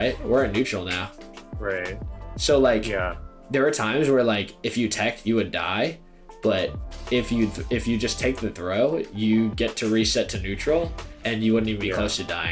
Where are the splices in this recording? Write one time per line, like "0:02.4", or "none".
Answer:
none